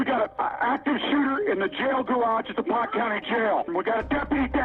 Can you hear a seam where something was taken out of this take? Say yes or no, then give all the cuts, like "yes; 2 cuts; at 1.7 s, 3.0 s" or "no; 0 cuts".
yes; 1 cut; at 3.7 s